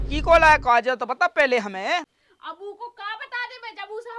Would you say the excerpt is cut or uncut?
cut